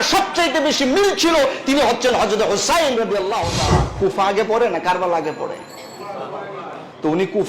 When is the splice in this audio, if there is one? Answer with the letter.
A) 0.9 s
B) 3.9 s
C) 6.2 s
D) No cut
B